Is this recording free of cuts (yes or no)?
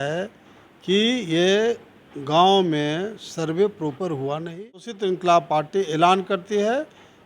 no